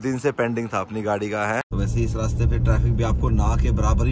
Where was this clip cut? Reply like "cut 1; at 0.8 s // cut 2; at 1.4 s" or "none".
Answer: cut 1; at 1.7 s